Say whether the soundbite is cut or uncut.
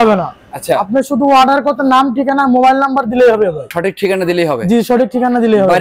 uncut